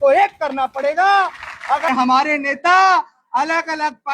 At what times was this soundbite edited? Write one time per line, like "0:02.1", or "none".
0:01.9

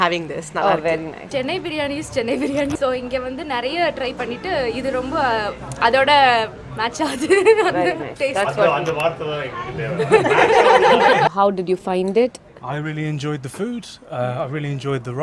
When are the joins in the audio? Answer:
0:01.3
0:02.7
0:11.3

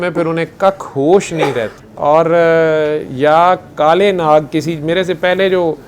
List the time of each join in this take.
0:01.8

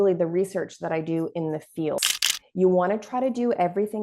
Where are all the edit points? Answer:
0:02.0

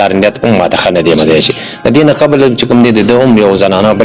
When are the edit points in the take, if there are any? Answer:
none

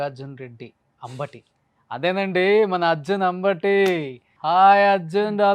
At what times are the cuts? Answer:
0:04.2

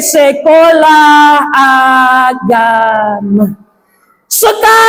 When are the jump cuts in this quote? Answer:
none

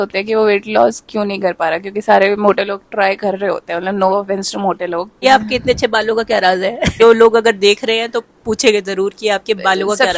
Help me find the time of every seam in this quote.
0:05.2

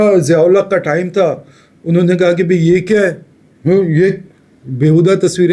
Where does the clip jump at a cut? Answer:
none

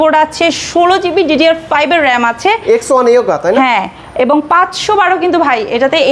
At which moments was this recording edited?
none

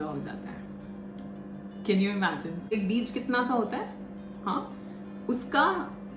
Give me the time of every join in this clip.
0:02.7

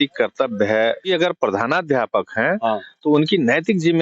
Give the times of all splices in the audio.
0:01.1

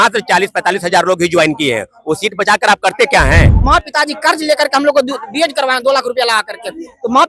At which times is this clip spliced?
0:03.5

